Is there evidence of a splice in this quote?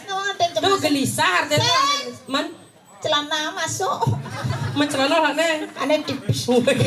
no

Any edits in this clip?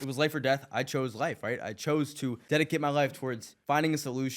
yes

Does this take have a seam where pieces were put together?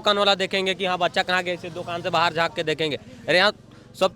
no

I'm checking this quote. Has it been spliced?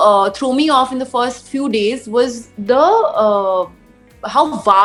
no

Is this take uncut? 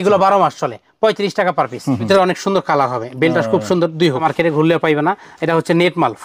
no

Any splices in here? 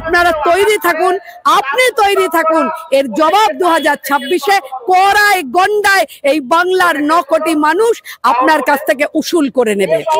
no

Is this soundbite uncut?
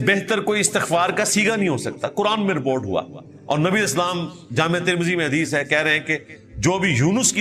yes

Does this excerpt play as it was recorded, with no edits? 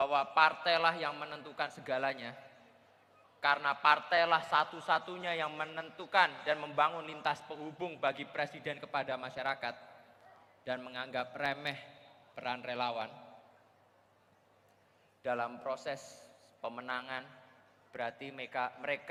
yes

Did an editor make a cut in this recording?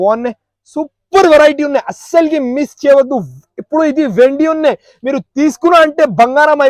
no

